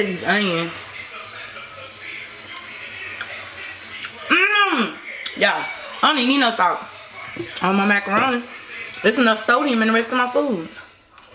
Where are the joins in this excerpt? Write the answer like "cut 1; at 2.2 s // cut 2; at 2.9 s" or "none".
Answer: none